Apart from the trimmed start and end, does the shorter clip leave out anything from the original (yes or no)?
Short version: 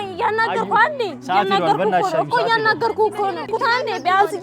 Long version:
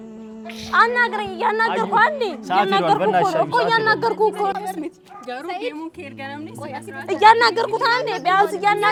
yes